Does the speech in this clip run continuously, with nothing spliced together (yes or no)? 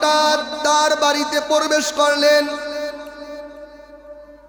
yes